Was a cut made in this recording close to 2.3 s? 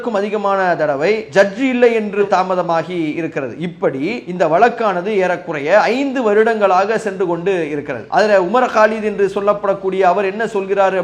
yes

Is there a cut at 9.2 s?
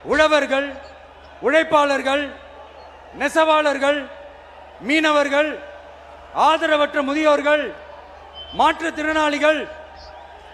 no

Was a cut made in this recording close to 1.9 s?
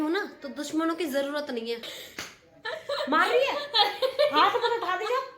yes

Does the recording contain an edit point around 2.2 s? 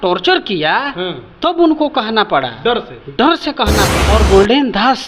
no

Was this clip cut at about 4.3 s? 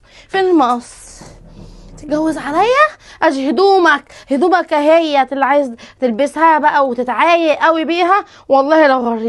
no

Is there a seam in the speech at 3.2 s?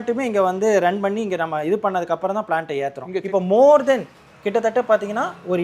yes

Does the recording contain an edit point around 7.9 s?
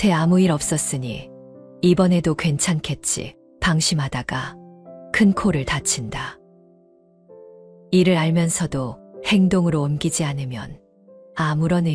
yes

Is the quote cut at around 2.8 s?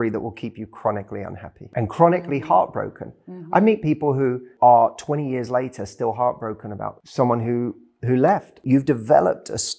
no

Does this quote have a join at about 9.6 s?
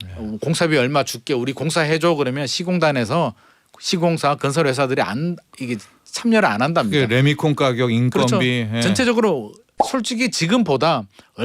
no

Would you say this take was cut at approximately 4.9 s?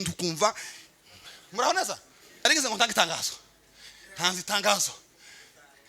no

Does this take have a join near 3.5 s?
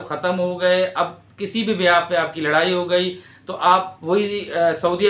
no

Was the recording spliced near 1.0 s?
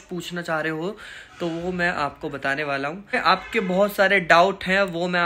no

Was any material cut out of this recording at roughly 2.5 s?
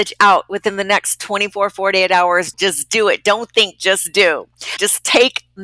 yes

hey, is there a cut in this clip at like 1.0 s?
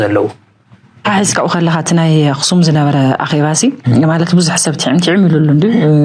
yes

